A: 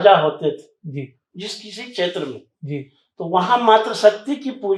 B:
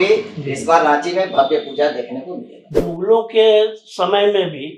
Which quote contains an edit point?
B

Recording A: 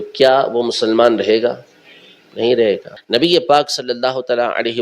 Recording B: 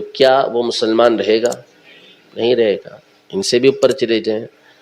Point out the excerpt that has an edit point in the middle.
A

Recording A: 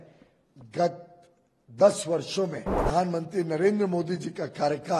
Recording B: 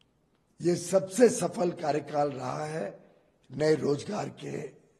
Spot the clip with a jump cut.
A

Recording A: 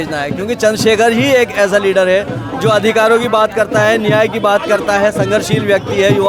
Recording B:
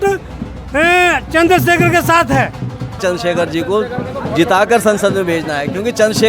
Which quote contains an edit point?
B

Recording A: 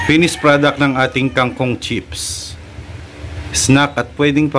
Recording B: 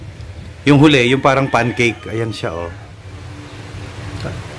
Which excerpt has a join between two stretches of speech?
A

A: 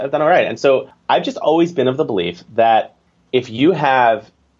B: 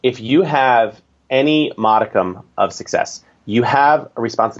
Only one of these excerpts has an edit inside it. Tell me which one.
A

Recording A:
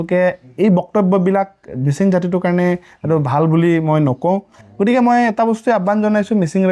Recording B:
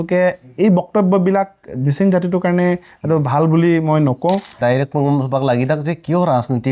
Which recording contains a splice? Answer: B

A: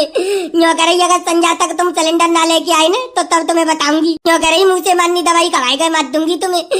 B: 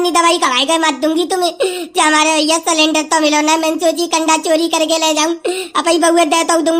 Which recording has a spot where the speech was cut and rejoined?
A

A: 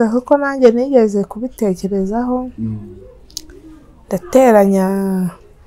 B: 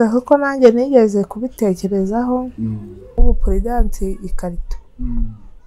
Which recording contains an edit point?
B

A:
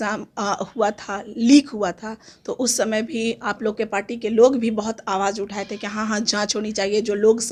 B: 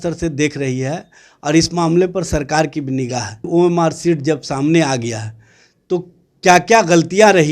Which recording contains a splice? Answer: B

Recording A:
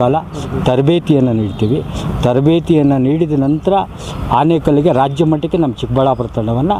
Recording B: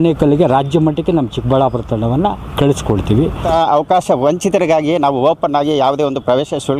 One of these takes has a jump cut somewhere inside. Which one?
B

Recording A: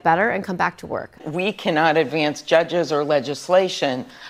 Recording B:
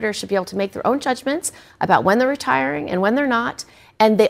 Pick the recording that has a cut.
A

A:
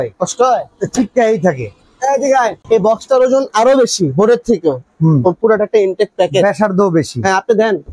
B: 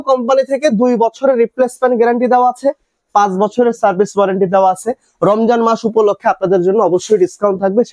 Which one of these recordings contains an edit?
A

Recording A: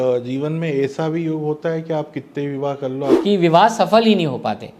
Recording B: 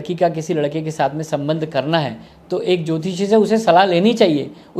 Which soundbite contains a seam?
A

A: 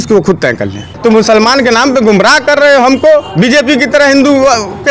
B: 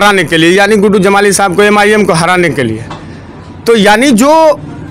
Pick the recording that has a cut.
A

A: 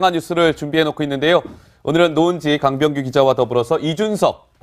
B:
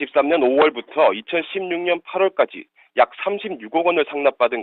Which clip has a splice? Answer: A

